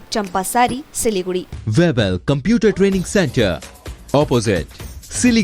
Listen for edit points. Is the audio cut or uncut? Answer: cut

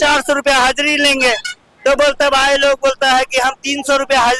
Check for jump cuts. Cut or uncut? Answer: uncut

